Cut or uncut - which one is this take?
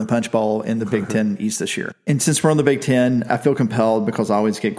cut